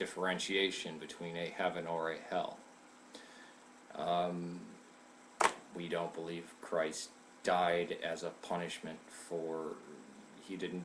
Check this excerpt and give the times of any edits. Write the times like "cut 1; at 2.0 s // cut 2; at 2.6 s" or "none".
cut 1; at 1.1 s

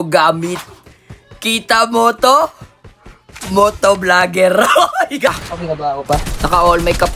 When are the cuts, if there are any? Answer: cut 1; at 5.4 s

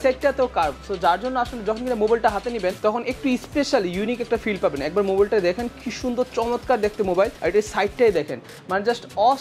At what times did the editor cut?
none

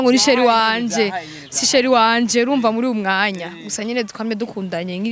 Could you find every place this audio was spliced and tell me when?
none

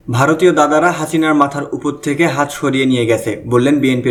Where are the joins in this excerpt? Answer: none

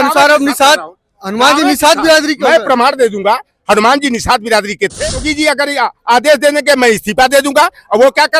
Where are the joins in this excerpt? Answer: cut 1; at 5.3 s

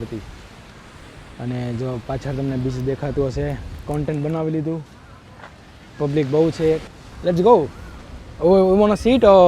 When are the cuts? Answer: cut 1; at 6.9 s

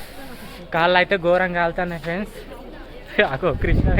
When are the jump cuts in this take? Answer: none

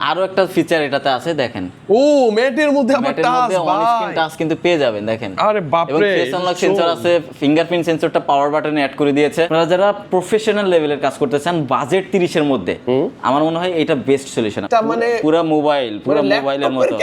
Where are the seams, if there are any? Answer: cut 1; at 9.5 s // cut 2; at 14.6 s

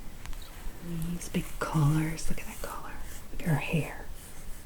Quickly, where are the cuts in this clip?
cut 1; at 0.9 s

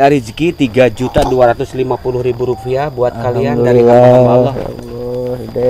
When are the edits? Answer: none

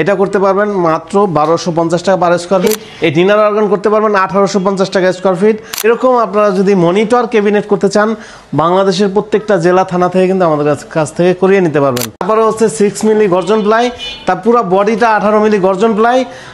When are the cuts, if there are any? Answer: cut 1; at 2.8 s // cut 2; at 5.7 s // cut 3; at 12.1 s

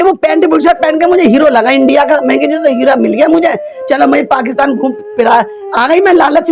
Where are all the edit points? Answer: none

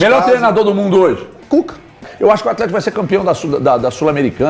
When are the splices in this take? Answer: cut 1; at 2.1 s

